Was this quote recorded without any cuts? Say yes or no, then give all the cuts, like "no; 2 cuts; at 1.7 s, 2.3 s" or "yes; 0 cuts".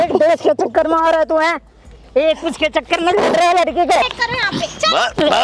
no; 1 cut; at 4.0 s